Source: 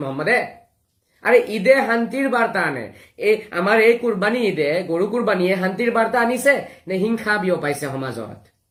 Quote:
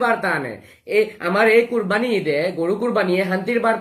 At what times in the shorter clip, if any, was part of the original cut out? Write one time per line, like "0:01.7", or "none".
none